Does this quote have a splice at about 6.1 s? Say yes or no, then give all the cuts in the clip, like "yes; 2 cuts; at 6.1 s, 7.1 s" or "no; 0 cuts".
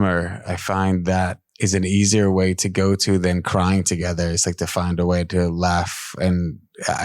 no; 1 cut; at 1.4 s